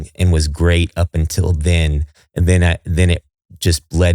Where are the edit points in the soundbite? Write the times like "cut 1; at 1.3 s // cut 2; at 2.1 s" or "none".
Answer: none